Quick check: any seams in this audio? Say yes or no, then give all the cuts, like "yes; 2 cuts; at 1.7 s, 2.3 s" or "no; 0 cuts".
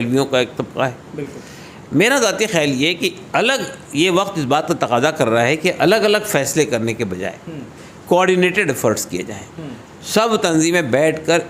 no; 0 cuts